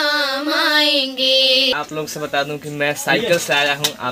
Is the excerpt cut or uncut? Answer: cut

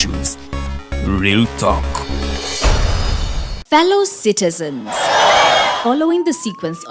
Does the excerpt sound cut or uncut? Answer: cut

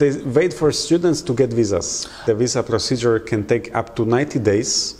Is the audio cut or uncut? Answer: cut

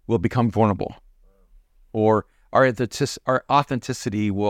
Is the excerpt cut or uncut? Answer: uncut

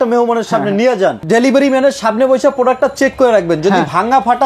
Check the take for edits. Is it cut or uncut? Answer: cut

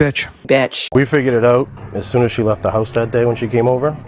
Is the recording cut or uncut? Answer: cut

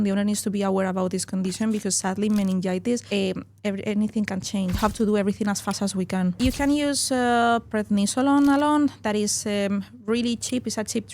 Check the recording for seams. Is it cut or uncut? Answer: cut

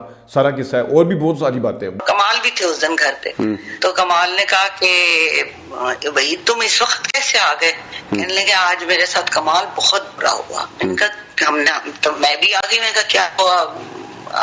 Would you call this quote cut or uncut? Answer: cut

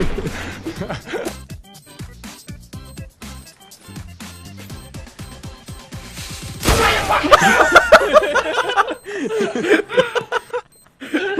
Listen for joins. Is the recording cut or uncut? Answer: cut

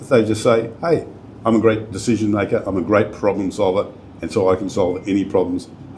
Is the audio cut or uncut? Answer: uncut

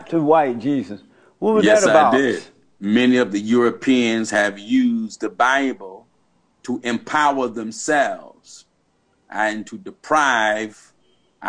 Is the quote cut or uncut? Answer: cut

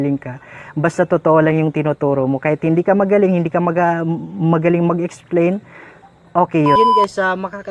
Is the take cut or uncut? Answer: cut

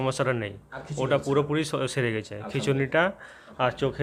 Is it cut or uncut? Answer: uncut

